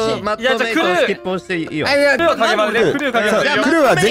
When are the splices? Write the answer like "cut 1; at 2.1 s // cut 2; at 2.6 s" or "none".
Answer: cut 1; at 2.2 s